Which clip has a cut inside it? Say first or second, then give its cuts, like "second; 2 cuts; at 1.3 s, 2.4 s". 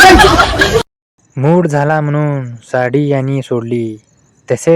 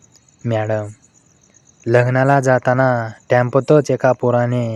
first; 1 cut; at 1.0 s